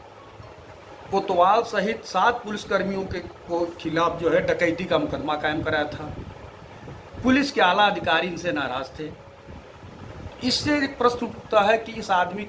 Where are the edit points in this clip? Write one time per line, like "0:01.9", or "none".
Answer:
none